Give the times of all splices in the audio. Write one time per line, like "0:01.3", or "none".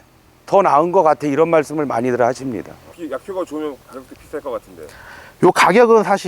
0:02.9